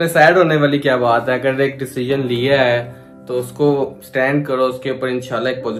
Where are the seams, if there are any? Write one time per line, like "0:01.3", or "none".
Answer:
none